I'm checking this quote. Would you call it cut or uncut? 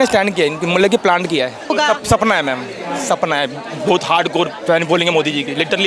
cut